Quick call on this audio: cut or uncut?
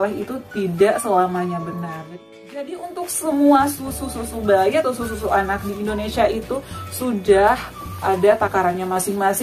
cut